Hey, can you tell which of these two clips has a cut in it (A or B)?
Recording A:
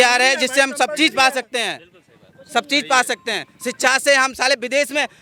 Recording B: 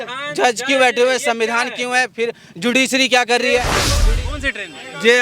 B